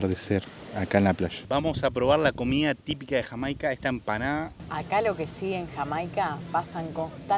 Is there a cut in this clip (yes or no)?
yes